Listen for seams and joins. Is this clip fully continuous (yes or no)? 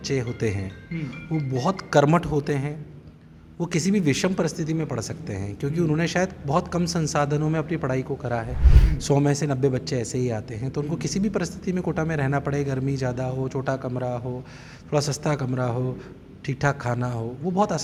yes